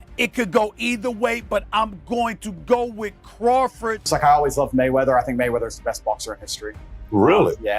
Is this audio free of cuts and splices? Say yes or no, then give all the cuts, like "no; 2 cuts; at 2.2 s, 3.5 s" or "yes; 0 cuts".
no; 1 cut; at 4.1 s